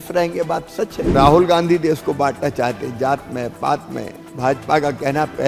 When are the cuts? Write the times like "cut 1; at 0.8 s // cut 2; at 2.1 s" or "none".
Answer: cut 1; at 1.1 s